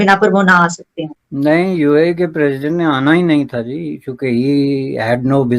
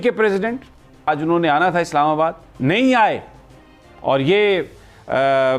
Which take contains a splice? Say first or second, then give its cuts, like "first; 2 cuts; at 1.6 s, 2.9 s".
second; 1 cut; at 1.1 s